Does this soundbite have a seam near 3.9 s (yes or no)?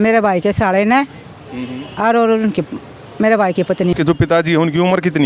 yes